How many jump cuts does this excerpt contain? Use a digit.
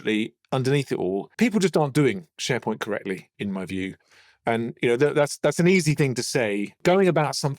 3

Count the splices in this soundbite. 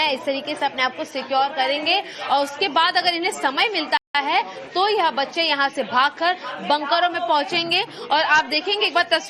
0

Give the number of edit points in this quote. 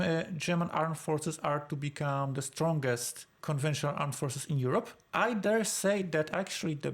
1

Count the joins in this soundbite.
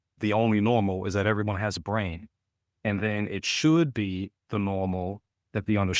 0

